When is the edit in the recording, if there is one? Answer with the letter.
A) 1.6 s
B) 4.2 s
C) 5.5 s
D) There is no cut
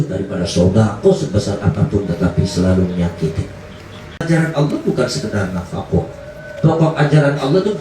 B